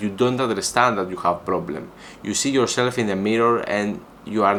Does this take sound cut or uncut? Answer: uncut